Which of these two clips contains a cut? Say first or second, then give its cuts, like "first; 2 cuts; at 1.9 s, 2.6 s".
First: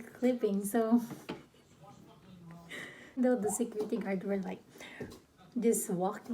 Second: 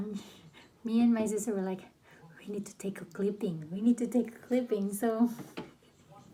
first; 1 cut; at 3.2 s